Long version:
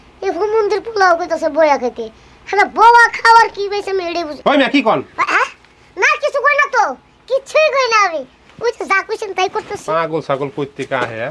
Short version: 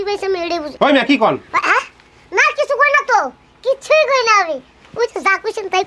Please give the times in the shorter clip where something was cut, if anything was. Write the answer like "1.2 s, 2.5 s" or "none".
none